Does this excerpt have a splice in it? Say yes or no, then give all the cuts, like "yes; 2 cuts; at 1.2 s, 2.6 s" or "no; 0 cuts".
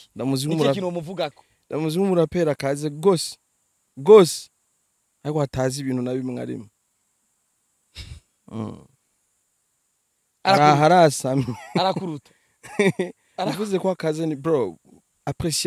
no; 0 cuts